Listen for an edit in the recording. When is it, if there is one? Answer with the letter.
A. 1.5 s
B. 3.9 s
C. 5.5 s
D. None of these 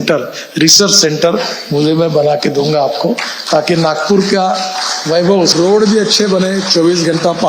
C